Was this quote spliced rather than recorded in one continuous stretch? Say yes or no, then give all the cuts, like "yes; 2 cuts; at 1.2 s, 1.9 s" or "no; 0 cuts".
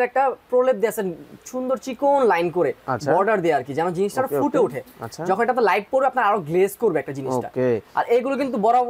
no; 0 cuts